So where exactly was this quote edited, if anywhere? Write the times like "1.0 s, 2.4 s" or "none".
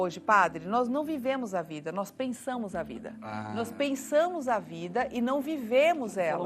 none